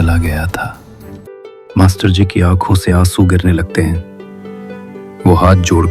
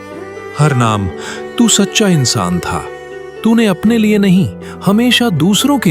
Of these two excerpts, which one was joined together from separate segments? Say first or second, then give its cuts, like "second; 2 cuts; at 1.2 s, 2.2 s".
first; 1 cut; at 1.3 s